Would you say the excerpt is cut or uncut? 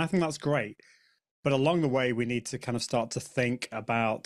uncut